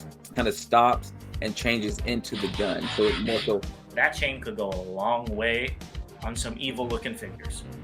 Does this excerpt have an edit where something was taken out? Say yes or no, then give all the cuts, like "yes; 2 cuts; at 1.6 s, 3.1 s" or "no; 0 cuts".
yes; 1 cut; at 3.8 s